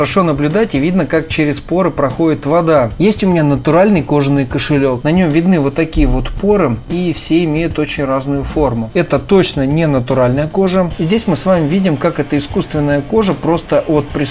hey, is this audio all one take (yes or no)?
no